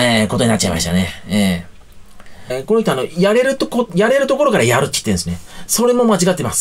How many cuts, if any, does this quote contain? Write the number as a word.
one